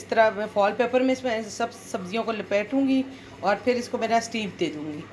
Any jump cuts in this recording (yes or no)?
no